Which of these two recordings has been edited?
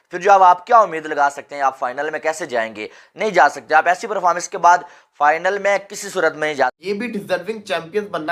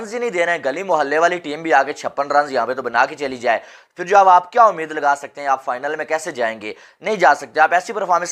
first; 1 cut; at 6.8 s

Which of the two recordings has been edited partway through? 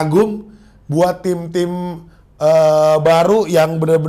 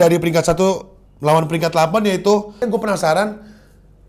second; 1 cut; at 2.6 s

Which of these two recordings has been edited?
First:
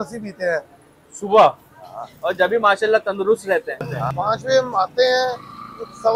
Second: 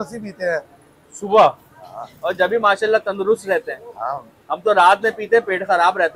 first; 1 cut; at 4.0 s

